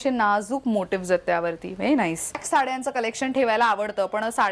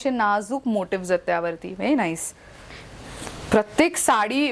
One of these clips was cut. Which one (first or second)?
first